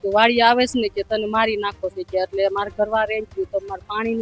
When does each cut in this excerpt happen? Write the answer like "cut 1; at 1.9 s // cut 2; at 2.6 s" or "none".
none